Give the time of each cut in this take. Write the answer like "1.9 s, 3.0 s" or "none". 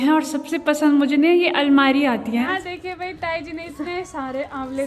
2.6 s